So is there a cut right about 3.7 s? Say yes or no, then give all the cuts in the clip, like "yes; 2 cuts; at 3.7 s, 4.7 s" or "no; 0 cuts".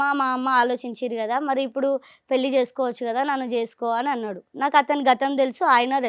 no; 0 cuts